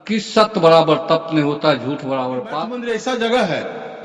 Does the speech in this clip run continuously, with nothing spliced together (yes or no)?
no